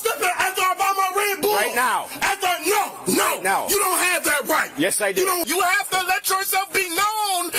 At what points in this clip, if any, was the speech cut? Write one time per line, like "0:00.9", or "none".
0:05.4